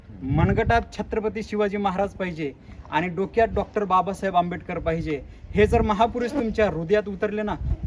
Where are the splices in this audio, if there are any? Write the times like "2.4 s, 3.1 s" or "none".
none